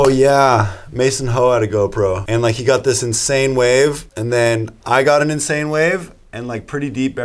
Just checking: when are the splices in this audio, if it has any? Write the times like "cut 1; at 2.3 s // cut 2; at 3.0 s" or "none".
cut 1; at 2.2 s // cut 2; at 4.1 s